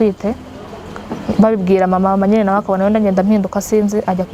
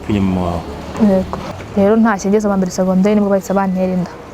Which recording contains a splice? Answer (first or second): second